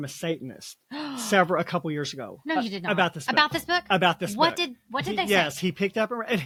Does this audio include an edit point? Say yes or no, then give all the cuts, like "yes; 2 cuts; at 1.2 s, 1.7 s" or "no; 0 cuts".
no; 0 cuts